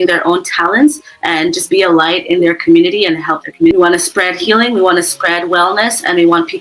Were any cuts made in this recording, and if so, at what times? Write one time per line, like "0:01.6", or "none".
0:03.7